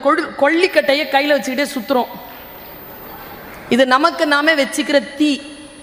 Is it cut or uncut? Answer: uncut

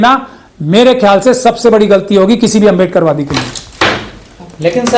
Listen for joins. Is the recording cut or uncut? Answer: uncut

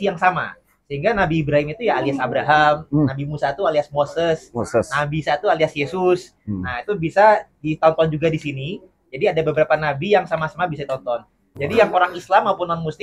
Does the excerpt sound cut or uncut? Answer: cut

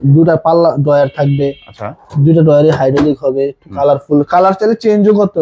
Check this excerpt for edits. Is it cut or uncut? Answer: uncut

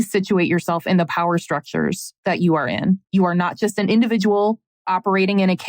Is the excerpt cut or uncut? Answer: cut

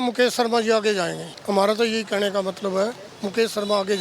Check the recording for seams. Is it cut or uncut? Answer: cut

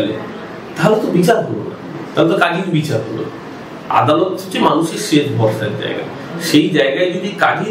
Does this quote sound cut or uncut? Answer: uncut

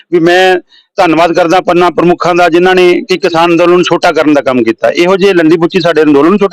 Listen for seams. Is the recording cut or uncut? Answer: uncut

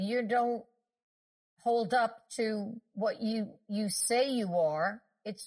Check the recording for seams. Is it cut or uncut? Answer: uncut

